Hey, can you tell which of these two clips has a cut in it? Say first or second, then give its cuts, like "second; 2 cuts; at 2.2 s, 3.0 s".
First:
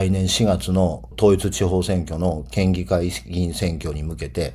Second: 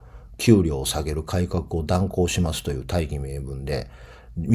first; 1 cut; at 1.0 s